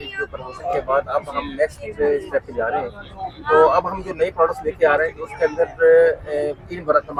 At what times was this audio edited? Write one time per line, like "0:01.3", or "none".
none